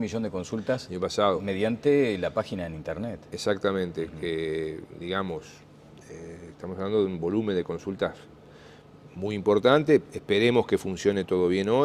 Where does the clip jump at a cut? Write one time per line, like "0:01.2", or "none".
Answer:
none